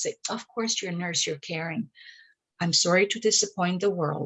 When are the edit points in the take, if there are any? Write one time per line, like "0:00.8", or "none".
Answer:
none